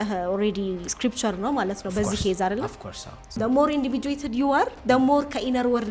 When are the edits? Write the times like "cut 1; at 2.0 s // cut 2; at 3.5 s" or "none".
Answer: cut 1; at 3.4 s

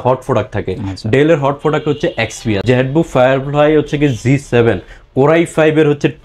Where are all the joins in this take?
cut 1; at 2.6 s

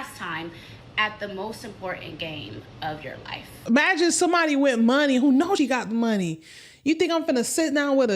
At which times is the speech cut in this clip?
cut 1; at 3.5 s

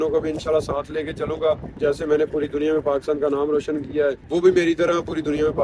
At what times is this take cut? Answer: cut 1; at 1.8 s // cut 2; at 4.2 s

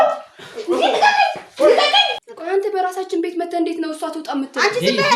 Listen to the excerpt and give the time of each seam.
cut 1; at 2.2 s

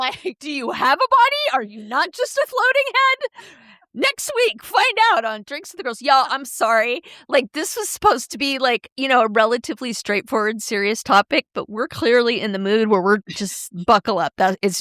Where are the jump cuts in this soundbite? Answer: cut 1; at 13.2 s

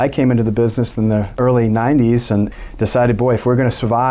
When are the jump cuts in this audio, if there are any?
none

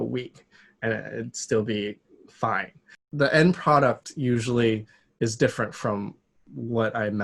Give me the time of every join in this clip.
cut 1; at 3.0 s

